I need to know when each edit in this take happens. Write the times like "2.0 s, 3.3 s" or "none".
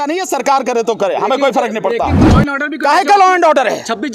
2.2 s